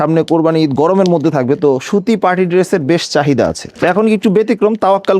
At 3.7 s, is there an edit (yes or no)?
yes